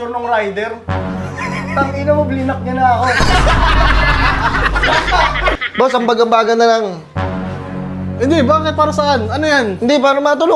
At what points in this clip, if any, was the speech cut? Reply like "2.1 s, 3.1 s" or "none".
5.6 s